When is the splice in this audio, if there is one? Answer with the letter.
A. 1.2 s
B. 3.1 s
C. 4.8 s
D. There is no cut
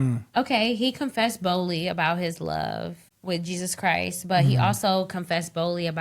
B